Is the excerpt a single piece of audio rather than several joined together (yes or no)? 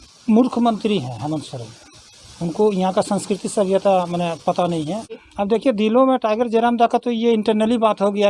no